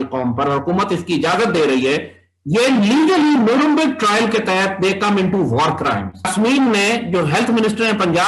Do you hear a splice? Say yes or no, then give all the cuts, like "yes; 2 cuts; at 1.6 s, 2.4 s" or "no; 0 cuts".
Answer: yes; 1 cut; at 6.2 s